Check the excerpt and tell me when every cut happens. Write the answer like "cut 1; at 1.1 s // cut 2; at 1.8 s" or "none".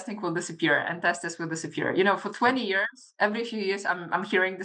none